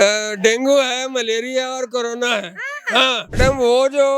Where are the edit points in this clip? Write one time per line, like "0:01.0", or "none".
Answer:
0:03.3